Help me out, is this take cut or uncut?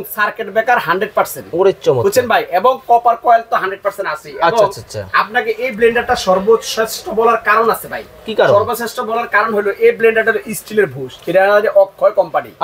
uncut